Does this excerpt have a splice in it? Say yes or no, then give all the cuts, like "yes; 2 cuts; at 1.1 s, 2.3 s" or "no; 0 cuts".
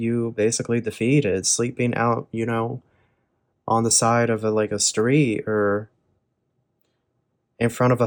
no; 0 cuts